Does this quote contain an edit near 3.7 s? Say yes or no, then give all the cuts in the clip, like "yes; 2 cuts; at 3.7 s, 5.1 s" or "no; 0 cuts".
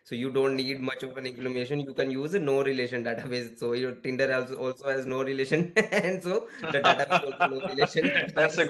no; 0 cuts